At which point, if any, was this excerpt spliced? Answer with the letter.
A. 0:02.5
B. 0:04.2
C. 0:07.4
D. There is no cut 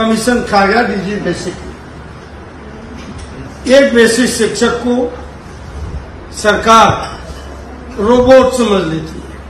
D